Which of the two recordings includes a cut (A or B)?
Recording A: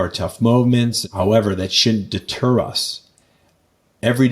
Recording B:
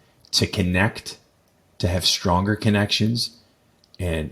A